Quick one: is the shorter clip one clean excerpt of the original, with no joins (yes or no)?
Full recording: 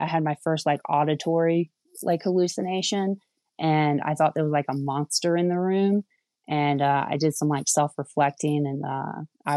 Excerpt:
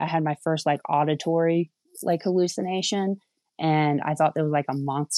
yes